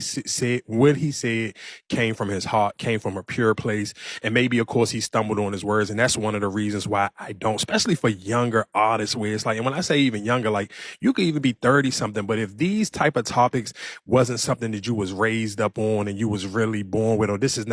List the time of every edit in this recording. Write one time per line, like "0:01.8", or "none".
none